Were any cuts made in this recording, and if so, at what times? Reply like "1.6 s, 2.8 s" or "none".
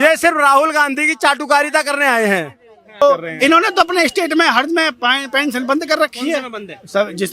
3.0 s

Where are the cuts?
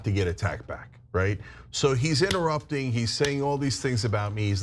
1.4 s

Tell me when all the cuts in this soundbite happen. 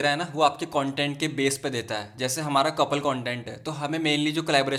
none

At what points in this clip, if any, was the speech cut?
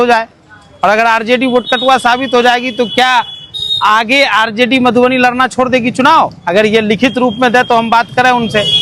none

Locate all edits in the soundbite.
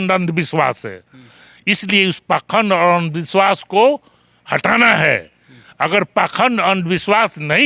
none

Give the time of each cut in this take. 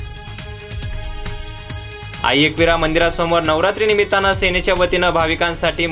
2.1 s

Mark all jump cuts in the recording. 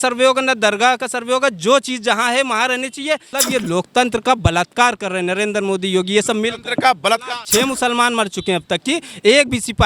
3.3 s, 7.4 s

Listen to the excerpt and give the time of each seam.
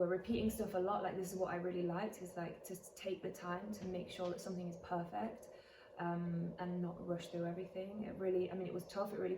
none

